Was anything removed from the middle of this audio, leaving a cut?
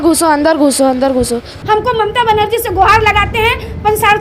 yes; 1 cut; at 1.5 s

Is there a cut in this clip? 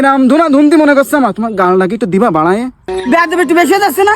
yes; 1 cut; at 2.9 s

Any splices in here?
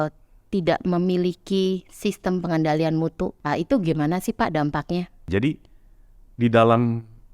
yes; 2 cuts; at 3.4 s, 5.3 s

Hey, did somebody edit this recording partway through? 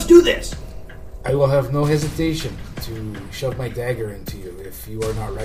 no; 0 cuts

